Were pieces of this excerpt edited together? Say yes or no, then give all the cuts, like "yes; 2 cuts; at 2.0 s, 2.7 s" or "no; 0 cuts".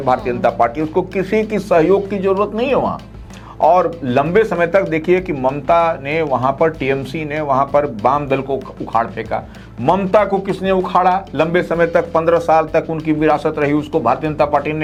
no; 0 cuts